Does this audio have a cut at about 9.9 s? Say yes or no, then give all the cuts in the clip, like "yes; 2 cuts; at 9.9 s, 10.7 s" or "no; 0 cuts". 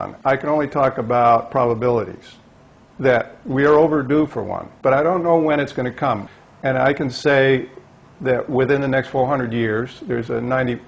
no; 1 cut; at 6.3 s